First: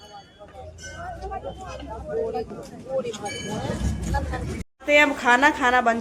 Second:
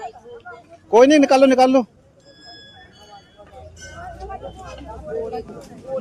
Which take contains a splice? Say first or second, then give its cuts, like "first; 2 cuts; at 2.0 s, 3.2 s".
first; 1 cut; at 4.6 s